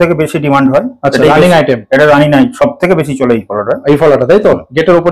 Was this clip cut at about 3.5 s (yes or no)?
no